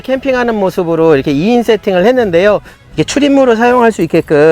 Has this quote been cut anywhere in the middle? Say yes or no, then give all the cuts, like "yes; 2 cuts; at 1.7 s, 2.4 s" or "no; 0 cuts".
yes; 1 cut; at 2.7 s